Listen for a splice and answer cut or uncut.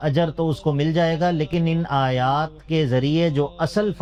uncut